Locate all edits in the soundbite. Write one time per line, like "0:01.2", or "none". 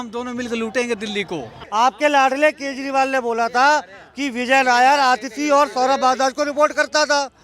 0:01.6